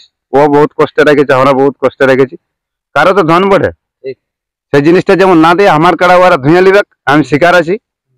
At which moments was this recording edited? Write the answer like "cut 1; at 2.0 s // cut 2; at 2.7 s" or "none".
none